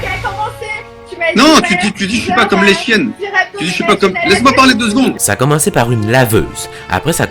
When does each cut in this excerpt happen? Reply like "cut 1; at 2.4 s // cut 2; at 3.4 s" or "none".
cut 1; at 5.2 s